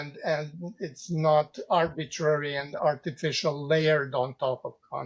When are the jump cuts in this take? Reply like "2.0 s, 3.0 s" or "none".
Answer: none